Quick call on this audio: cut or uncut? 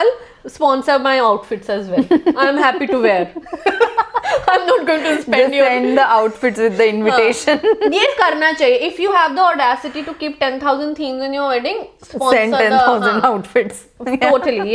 uncut